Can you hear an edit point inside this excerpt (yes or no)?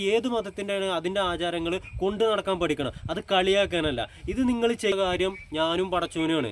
yes